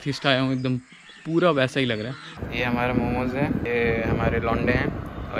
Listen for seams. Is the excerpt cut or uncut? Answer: cut